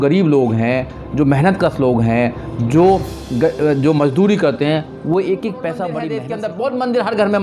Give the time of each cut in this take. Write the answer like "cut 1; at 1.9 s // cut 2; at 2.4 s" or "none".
cut 1; at 6.1 s